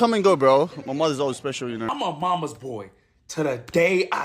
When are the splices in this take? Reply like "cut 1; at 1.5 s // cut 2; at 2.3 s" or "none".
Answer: cut 1; at 1.9 s